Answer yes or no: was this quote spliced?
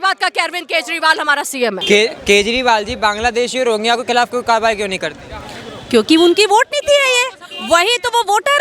yes